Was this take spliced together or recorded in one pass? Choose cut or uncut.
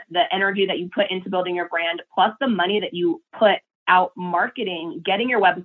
uncut